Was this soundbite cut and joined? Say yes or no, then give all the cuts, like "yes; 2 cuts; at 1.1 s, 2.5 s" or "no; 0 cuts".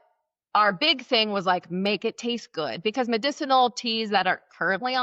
no; 0 cuts